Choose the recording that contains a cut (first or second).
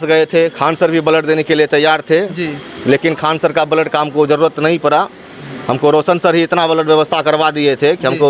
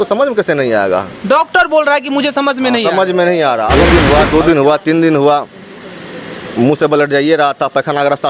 second